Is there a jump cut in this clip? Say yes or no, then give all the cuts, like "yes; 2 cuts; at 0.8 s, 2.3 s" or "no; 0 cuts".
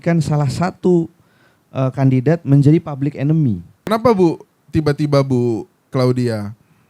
yes; 1 cut; at 3.9 s